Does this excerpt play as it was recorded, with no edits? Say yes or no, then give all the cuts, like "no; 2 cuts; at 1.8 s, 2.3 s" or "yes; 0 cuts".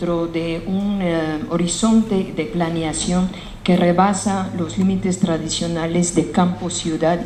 yes; 0 cuts